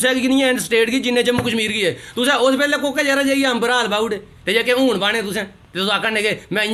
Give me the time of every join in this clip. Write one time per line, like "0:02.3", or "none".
none

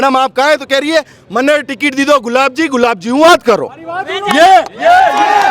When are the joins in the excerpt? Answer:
none

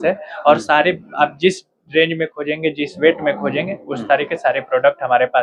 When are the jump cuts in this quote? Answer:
none

